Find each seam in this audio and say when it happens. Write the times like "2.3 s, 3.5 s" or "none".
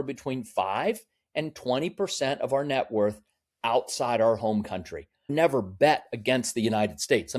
5.3 s